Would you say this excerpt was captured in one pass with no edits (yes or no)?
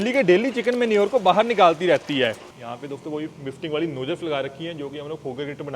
no